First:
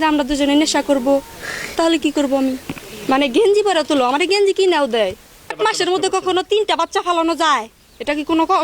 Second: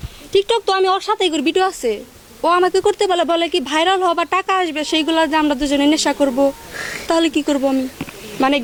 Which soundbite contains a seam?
first; 1 cut; at 5.4 s

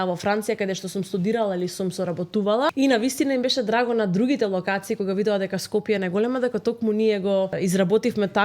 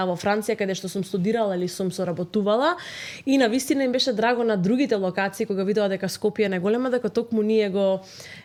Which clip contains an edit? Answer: first; 2 cuts; at 2.7 s, 7.6 s

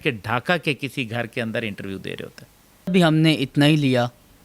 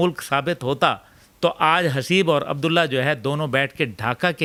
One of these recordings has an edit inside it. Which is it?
first; 1 cut; at 2.9 s

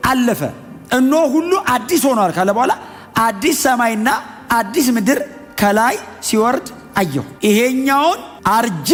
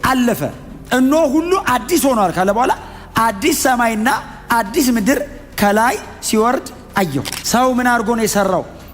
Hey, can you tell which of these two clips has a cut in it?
second; 1 cut; at 7.3 s

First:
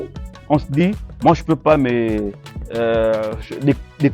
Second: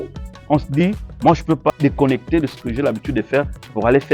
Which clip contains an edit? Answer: second; 1 cut; at 1.7 s

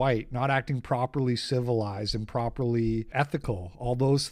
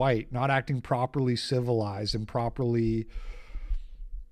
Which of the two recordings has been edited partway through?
first; 1 cut; at 3.1 s

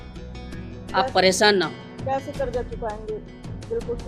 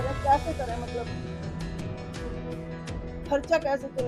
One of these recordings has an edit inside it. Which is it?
first; 1 cut; at 0.9 s

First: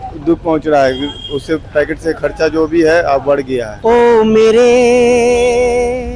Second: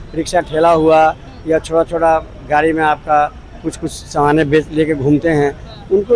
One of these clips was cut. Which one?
first; 1 cut; at 3.7 s

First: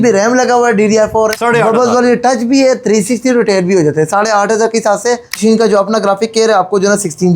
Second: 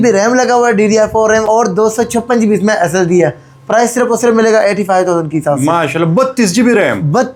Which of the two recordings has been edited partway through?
first; 2 cuts; at 1.3 s, 5.4 s

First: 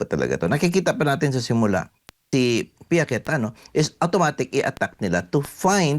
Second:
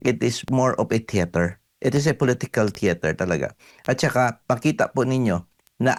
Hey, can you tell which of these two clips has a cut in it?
first; 1 cut; at 2.2 s

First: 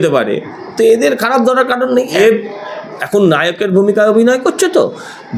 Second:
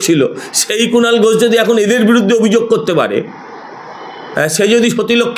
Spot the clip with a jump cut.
first; 1 cut; at 2.2 s

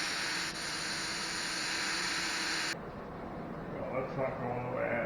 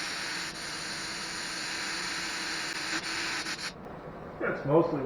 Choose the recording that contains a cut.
first; 1 cut; at 2.7 s

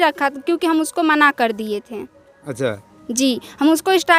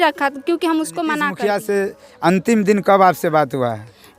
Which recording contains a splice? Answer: second; 1 cut; at 1.3 s

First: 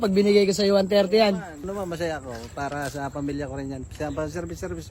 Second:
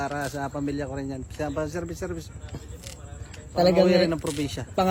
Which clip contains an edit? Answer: first; 1 cut; at 1.6 s

